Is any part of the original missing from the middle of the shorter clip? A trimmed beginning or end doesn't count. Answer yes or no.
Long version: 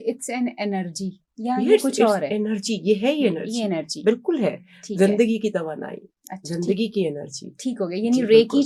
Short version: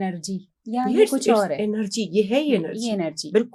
no